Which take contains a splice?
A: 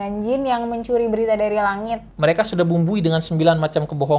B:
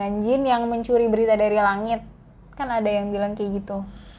A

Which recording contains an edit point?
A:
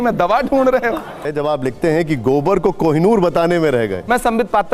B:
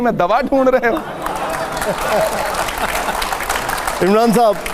A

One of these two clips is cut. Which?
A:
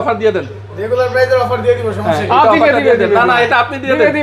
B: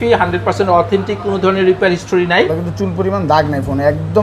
B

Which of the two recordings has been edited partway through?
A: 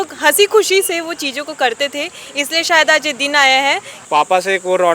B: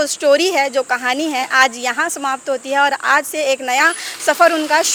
A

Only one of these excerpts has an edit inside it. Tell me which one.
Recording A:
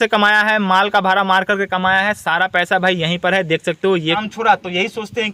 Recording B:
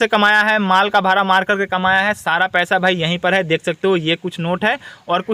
A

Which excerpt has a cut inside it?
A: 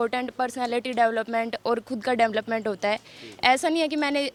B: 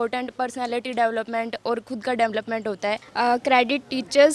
B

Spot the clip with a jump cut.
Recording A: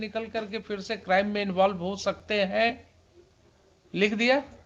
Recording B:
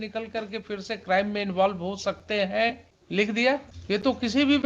B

